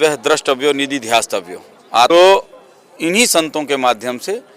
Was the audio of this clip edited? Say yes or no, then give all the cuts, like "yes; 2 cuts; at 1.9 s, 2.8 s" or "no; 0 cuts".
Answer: yes; 1 cut; at 2.1 s